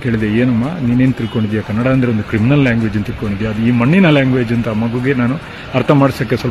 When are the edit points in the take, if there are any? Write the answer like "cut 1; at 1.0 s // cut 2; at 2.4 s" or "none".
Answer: none